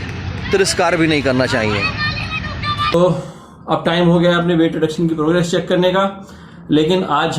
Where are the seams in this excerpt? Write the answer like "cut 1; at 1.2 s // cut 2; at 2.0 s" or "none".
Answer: cut 1; at 2.9 s